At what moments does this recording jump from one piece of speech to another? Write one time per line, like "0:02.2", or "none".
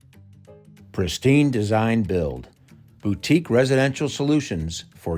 0:00.9